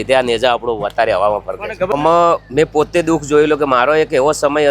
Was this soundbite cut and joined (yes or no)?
yes